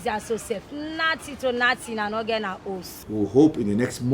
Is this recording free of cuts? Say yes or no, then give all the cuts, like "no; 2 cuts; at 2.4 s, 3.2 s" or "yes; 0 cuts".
no; 1 cut; at 2.9 s